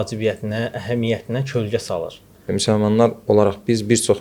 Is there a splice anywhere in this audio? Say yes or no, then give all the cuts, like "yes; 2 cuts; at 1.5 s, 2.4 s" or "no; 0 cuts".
yes; 1 cut; at 2.5 s